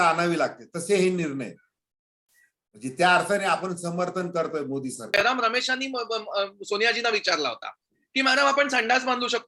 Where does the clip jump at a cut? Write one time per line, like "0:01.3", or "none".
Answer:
0:05.1